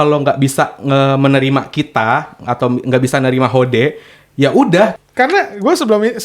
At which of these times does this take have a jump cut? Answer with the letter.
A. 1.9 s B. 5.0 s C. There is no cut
B